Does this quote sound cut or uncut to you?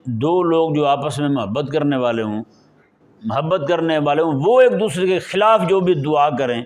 uncut